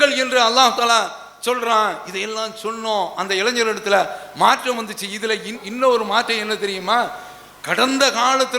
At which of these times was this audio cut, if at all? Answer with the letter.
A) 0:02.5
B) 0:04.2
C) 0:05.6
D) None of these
C